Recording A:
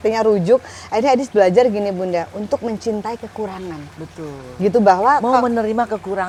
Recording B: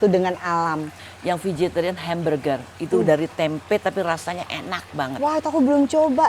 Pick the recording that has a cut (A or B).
B